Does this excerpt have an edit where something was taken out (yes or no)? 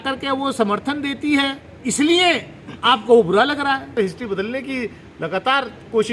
yes